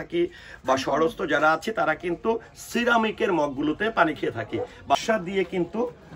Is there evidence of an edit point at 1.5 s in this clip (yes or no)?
no